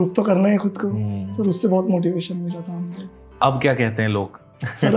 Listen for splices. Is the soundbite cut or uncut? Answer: uncut